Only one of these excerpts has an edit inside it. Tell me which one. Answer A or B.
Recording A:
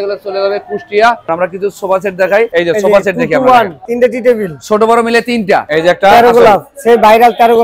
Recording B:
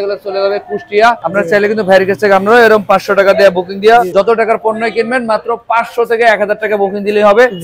A